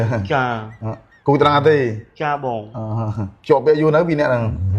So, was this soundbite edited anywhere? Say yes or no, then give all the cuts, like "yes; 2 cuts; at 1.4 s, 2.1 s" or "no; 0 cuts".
no; 0 cuts